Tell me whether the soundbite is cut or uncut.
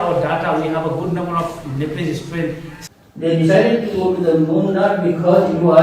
cut